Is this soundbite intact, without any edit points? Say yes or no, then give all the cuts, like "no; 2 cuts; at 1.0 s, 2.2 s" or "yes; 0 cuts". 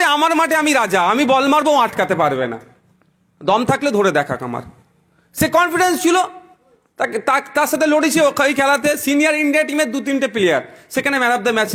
yes; 0 cuts